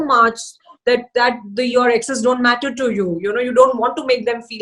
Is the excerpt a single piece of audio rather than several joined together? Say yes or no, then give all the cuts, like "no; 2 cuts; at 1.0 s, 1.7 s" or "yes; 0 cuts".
yes; 0 cuts